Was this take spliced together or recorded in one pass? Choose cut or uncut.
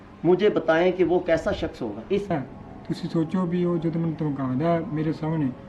cut